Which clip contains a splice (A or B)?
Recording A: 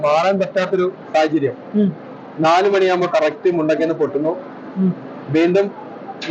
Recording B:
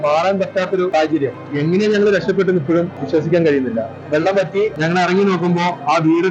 B